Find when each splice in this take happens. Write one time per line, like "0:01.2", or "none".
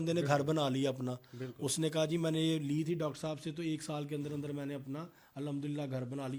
none